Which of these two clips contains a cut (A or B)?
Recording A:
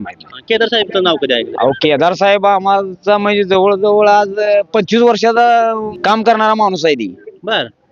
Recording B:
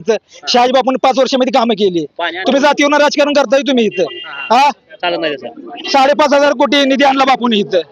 A